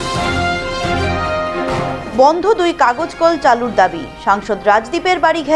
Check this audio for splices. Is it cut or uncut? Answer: cut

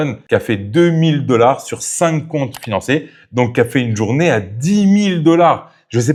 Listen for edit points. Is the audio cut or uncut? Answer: uncut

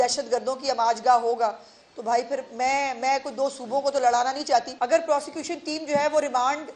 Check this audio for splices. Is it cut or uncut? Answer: cut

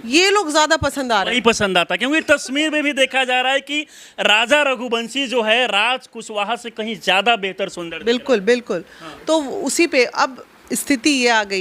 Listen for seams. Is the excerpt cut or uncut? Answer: uncut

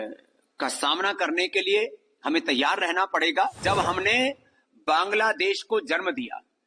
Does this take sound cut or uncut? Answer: cut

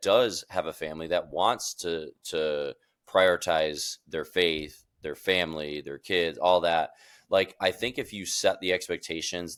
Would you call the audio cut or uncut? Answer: uncut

